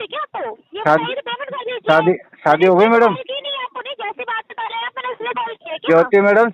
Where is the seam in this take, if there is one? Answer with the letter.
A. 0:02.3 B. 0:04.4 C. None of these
C